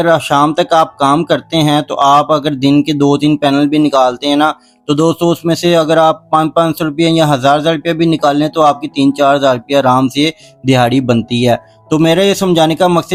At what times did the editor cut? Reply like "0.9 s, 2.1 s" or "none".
none